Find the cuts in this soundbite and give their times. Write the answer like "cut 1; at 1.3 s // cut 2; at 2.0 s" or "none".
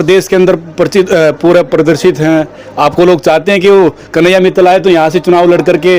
none